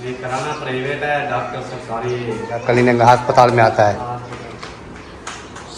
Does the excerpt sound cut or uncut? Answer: cut